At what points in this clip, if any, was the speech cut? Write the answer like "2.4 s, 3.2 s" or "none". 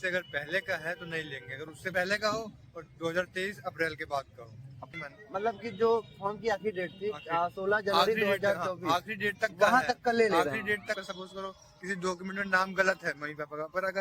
1.9 s, 4.9 s, 11.0 s